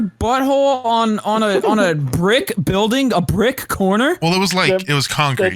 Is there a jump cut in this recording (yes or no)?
no